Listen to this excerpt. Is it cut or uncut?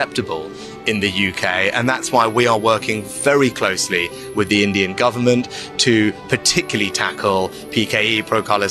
uncut